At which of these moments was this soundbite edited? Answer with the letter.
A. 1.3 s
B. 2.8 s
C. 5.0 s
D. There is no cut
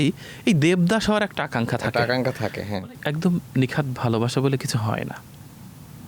B